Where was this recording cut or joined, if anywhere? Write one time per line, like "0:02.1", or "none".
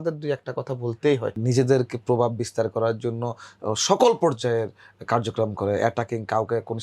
0:01.4